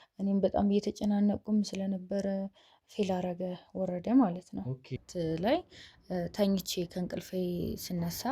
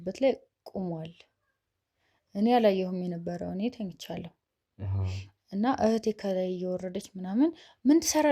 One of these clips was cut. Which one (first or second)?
first